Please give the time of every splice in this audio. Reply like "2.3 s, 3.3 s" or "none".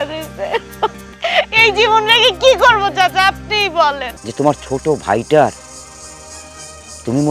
1.1 s, 4.2 s